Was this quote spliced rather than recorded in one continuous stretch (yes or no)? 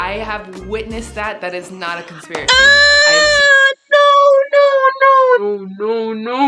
yes